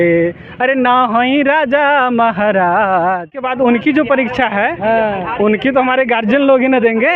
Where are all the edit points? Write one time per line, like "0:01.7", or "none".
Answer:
0:03.4